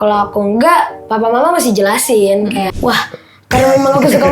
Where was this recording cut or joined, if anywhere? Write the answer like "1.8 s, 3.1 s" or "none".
2.7 s